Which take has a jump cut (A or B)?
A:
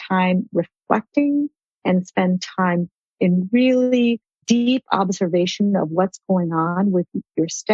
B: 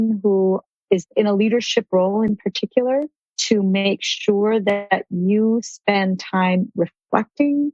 A